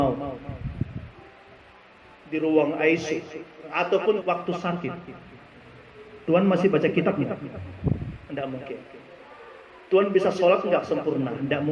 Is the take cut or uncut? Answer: cut